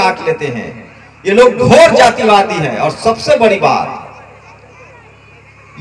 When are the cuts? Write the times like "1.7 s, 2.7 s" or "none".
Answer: none